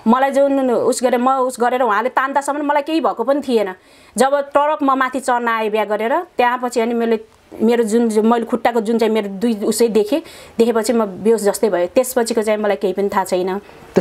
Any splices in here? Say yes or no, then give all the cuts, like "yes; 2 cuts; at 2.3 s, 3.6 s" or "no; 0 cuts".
no; 0 cuts